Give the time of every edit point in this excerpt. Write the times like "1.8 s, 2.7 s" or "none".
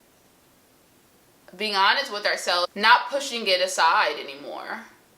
2.7 s